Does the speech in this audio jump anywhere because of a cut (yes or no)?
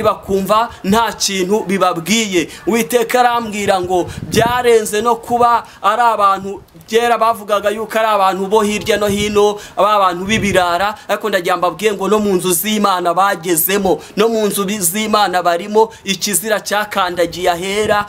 no